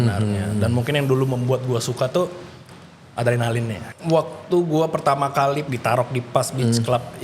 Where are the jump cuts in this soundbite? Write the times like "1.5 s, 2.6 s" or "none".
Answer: 3.9 s, 5.6 s